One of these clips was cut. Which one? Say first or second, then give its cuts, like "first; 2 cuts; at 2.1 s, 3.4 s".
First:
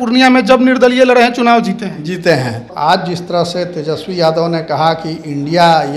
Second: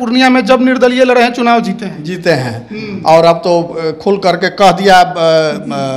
first; 1 cut; at 2.7 s